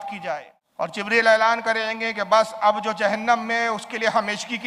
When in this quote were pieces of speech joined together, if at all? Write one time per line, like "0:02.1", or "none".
0:01.0